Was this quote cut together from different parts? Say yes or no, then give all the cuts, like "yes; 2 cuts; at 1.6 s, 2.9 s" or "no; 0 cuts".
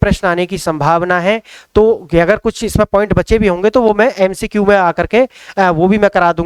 no; 0 cuts